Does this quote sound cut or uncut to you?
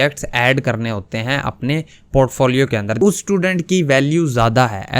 cut